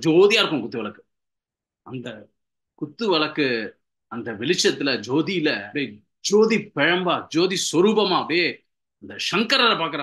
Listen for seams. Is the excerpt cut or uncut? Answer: cut